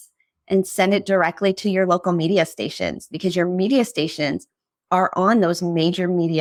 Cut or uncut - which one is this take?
uncut